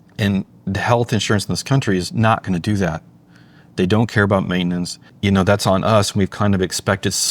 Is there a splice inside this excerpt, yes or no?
yes